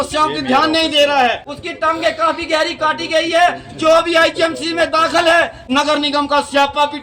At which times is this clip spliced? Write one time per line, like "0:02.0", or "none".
0:01.5
0:05.6